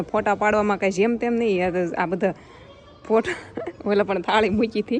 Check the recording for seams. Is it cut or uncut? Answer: uncut